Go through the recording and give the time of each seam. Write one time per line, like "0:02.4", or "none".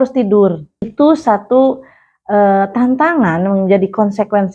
0:00.9